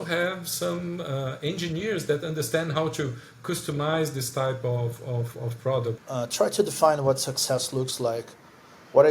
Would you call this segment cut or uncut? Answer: cut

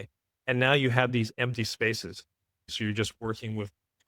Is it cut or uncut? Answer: cut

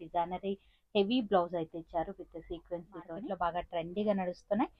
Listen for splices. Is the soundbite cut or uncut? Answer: cut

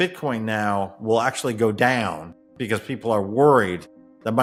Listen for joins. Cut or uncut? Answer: uncut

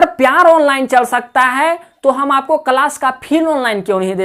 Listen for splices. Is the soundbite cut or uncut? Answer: uncut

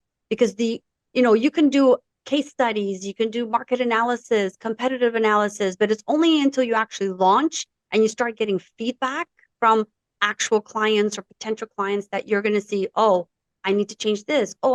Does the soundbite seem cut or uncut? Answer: uncut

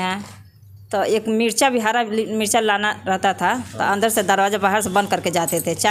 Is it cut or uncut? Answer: uncut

